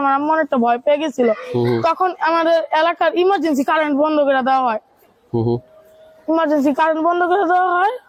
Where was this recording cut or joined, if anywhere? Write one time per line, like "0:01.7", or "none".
none